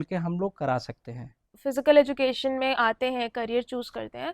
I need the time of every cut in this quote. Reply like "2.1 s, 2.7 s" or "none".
1.6 s